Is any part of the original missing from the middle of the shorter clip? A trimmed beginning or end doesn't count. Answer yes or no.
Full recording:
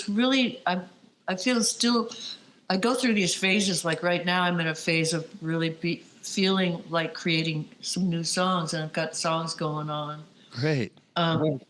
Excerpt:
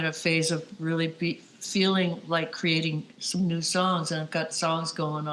no